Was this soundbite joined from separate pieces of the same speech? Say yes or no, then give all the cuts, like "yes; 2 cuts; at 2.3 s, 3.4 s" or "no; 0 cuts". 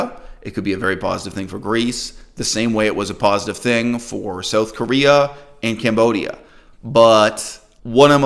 no; 0 cuts